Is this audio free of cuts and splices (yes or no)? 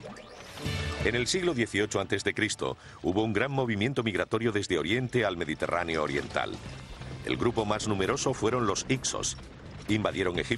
no